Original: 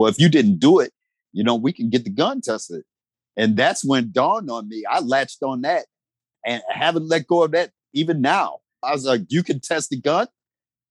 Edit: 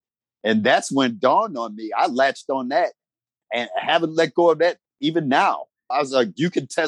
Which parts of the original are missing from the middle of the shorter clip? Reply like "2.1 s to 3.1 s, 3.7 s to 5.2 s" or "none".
none